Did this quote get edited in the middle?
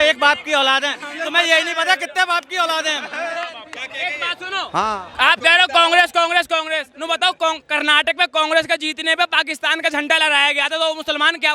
no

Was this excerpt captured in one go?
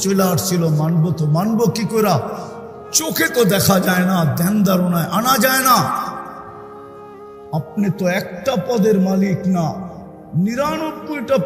yes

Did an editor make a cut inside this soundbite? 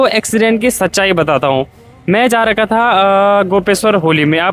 no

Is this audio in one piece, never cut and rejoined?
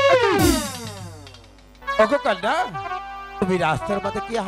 no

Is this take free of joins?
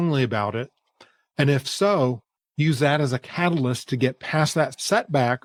yes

